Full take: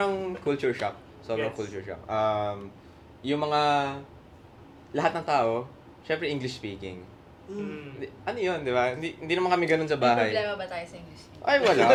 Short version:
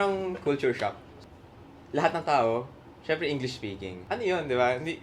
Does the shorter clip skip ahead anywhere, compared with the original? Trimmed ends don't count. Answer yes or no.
yes